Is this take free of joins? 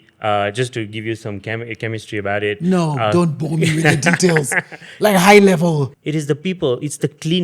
no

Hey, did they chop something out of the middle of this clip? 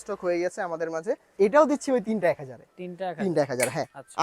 yes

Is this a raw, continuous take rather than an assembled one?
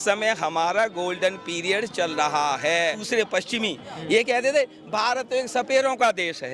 no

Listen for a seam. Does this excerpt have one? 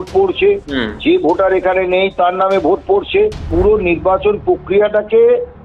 yes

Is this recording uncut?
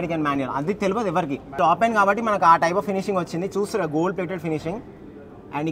no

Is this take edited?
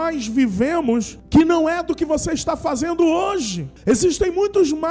yes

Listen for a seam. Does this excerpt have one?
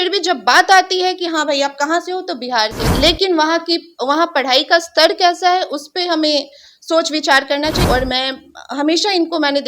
yes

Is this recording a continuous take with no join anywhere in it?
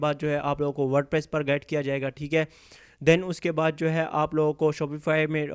yes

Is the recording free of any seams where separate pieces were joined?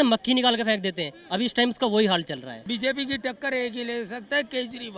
no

